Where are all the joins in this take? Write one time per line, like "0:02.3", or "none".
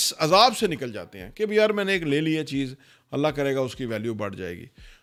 none